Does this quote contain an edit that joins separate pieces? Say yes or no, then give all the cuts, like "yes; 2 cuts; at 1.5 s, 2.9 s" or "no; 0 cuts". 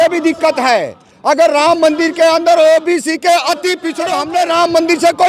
yes; 1 cut; at 3.9 s